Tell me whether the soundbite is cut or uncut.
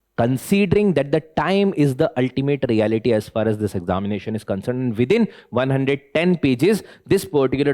uncut